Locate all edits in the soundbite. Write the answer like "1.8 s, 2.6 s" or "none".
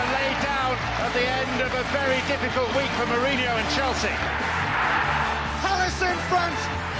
2.0 s

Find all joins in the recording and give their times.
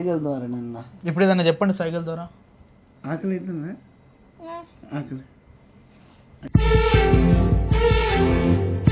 6.3 s

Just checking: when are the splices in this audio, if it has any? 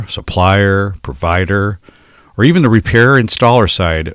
none

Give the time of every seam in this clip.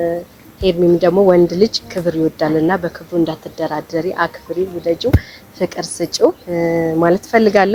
none

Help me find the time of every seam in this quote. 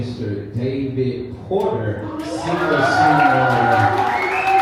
none

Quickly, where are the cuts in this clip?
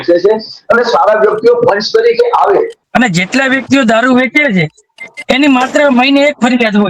2.8 s

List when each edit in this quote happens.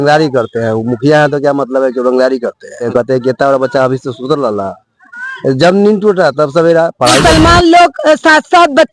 2.8 s, 7.2 s

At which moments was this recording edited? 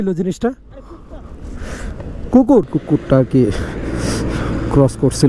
2.8 s

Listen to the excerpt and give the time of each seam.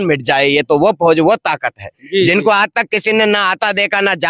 none

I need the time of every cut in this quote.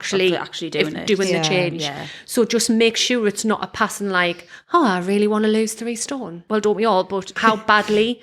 6.3 s, 7.3 s

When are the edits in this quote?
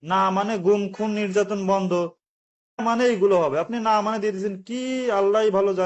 2.8 s

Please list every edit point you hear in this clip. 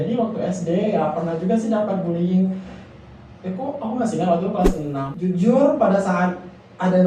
5.0 s

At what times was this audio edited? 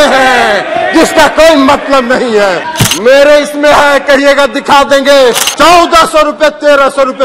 2.7 s, 5.5 s

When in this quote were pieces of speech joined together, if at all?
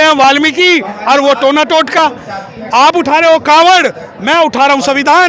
none

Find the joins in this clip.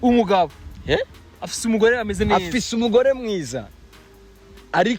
none

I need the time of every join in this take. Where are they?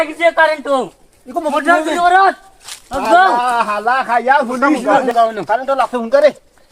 4.8 s

